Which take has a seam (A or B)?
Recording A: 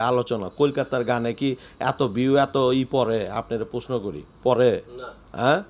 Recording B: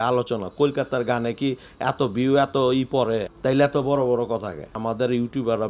B